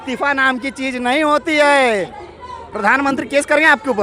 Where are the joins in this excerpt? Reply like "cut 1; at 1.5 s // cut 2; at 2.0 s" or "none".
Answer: cut 1; at 2.2 s